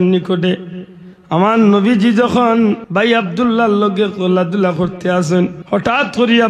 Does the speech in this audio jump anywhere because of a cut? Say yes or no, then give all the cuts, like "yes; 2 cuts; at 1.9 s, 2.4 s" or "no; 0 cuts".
yes; 2 cuts; at 2.8 s, 5.6 s